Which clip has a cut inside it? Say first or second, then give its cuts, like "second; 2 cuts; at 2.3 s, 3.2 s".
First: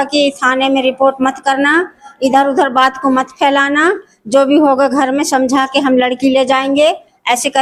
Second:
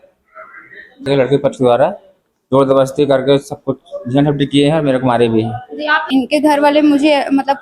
second; 2 cuts; at 1.1 s, 6.1 s